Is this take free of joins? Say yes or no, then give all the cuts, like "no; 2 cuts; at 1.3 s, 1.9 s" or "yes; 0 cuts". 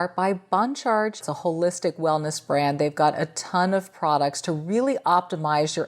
no; 1 cut; at 1.2 s